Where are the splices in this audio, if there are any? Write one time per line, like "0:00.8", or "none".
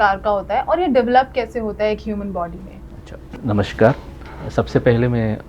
none